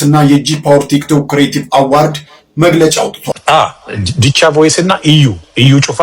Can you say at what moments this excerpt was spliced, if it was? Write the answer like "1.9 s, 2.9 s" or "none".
3.3 s